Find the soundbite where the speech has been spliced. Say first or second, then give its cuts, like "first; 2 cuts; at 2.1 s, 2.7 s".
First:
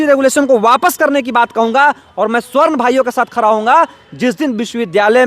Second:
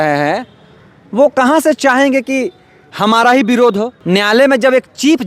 second; 1 cut; at 4.0 s